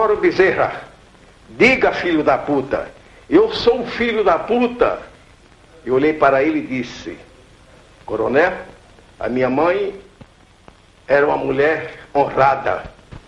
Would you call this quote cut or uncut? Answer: uncut